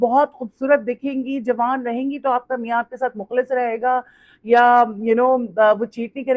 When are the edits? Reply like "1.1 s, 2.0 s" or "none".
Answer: none